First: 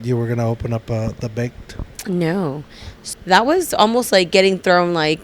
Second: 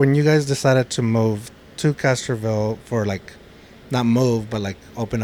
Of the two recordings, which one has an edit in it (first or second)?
first